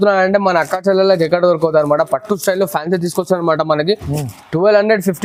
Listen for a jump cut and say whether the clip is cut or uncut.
uncut